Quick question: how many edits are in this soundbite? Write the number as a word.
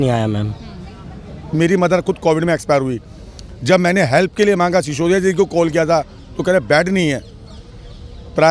one